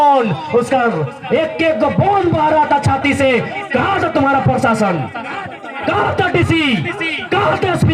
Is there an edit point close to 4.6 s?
no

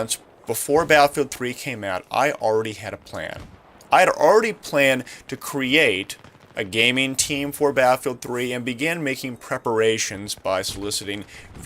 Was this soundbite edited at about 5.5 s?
no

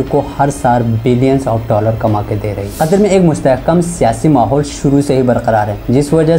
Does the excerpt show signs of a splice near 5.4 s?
no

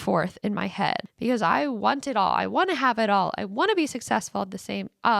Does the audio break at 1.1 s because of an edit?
yes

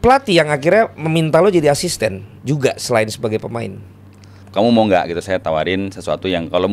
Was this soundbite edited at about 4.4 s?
yes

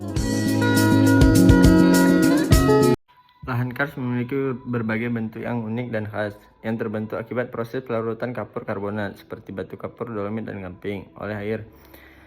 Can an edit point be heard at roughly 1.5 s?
no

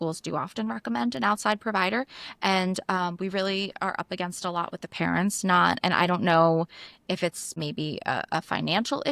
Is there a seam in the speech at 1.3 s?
no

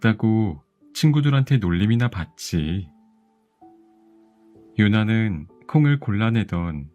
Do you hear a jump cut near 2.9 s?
yes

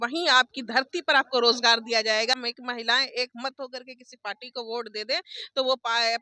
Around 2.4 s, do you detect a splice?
yes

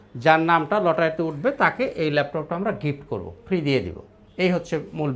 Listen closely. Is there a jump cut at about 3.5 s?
no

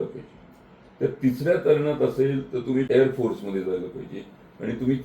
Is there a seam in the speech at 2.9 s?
yes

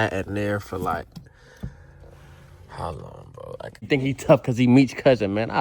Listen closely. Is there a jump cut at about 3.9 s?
yes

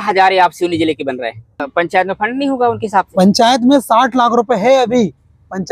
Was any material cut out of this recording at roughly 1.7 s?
yes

